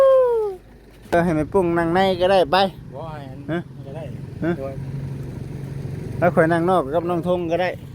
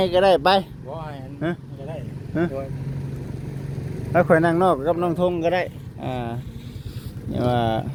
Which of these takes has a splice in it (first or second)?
first